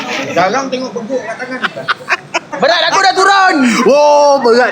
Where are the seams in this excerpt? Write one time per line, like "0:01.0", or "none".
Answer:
0:02.6